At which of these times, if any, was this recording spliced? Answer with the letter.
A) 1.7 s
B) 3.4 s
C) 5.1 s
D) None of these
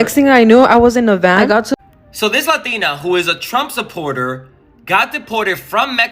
A